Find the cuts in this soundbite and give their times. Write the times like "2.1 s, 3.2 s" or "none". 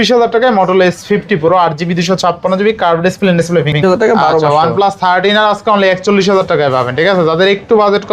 3.8 s